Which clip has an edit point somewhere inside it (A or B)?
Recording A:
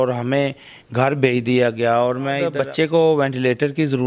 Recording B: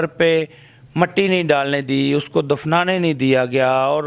A